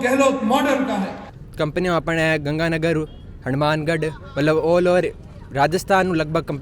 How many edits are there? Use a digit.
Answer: 1